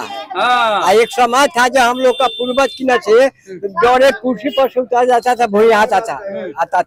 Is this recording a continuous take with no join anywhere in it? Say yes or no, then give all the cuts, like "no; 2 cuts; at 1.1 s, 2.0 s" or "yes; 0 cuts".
yes; 0 cuts